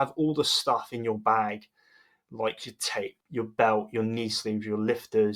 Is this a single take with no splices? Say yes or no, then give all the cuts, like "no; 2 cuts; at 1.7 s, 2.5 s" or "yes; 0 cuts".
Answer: no; 1 cut; at 3.2 s